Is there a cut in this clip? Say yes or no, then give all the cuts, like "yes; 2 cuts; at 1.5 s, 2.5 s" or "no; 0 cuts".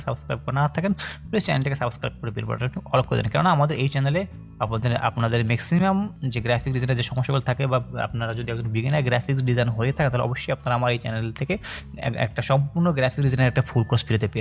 no; 0 cuts